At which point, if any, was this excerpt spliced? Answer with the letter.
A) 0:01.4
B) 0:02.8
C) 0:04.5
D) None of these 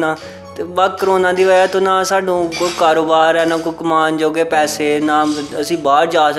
D